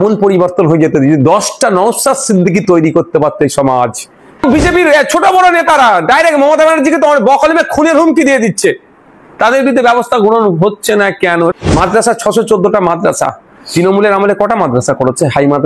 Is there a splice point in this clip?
yes; 2 cuts; at 4.4 s, 11.5 s

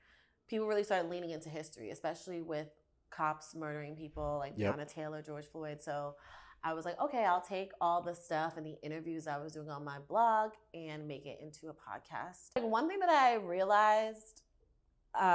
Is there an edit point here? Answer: yes; 1 cut; at 12.6 s

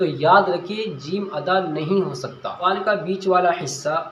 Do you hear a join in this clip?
yes; 1 cut; at 2.6 s

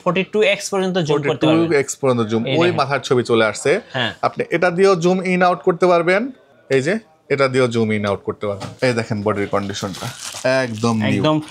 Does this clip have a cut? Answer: yes; 1 cut; at 8.7 s

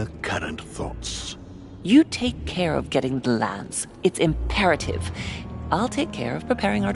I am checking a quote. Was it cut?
yes; 2 cuts; at 1.1 s, 4.4 s

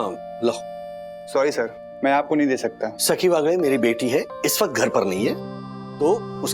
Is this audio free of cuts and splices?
no; 1 cut; at 3.0 s

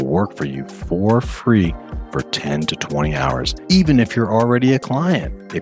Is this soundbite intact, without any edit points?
no; 1 cut; at 3.5 s

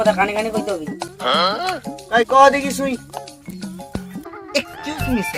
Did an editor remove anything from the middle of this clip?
yes; 1 cut; at 4.3 s

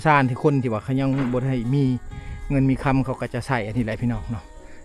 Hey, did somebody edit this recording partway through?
no; 0 cuts

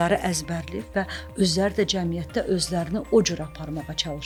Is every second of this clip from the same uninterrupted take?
yes; 0 cuts

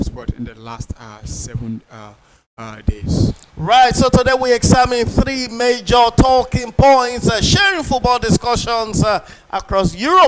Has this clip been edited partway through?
no; 0 cuts

